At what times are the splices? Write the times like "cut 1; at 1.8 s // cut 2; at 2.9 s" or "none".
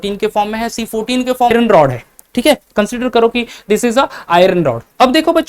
cut 1; at 1.5 s